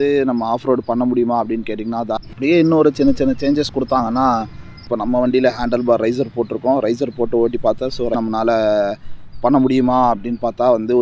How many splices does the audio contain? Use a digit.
3